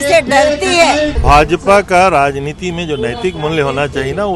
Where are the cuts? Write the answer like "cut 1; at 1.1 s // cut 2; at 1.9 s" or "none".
cut 1; at 1.1 s